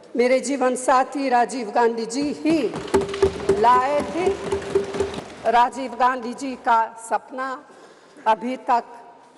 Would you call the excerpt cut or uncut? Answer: cut